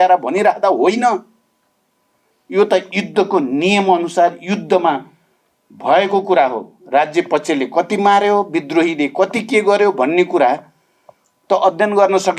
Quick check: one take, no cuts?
yes; 0 cuts

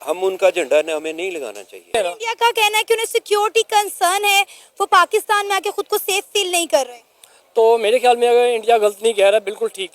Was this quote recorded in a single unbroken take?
no; 1 cut; at 1.7 s

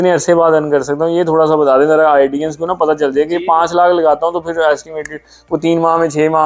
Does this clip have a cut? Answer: no; 0 cuts

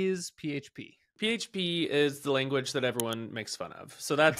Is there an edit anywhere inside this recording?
yes; 1 cut; at 1.1 s

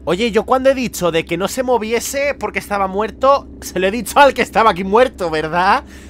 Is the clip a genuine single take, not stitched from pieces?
yes; 0 cuts

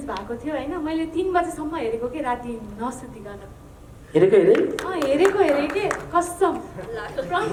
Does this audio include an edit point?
no; 0 cuts

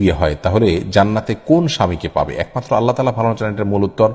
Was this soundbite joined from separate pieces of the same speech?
no; 0 cuts

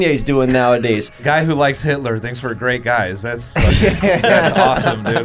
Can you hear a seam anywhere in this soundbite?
yes; 1 cut; at 1.1 s

